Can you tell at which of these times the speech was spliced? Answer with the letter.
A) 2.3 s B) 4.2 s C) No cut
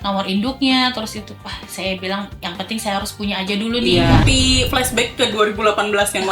B